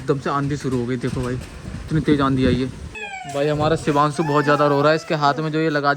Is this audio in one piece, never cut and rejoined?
no; 2 cuts; at 1.8 s, 3.0 s

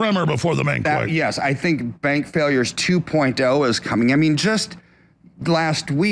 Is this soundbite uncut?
yes; 0 cuts

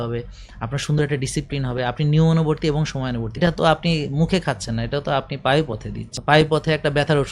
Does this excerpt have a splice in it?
yes; 2 cuts; at 3.3 s, 6.1 s

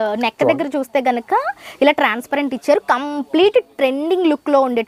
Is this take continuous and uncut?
yes; 0 cuts

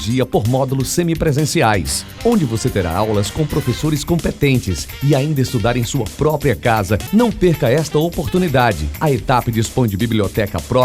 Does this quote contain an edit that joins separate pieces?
no; 0 cuts

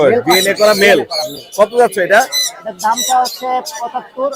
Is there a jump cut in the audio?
no; 0 cuts

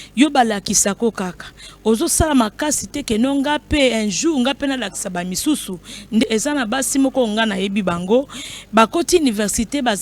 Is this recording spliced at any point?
yes; 1 cut; at 6.2 s

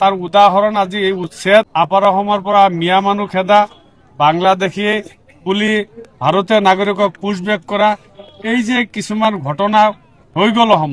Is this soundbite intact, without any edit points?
no; 1 cut; at 1.7 s

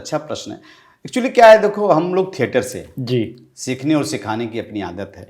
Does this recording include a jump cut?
no; 0 cuts

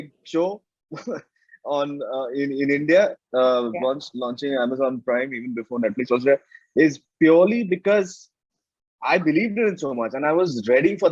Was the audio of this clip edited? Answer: no; 0 cuts

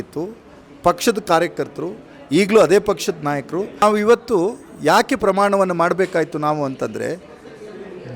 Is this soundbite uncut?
no; 1 cut; at 3.8 s

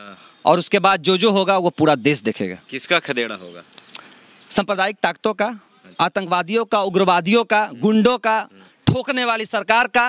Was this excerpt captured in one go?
yes; 0 cuts

